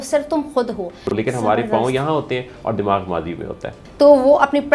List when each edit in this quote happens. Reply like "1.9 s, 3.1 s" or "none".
1.1 s, 3.8 s